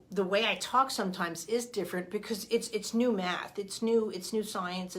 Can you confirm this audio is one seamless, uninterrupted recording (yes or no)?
yes